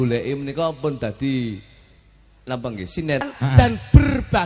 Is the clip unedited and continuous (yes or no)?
no